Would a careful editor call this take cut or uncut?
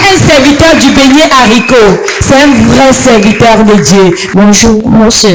cut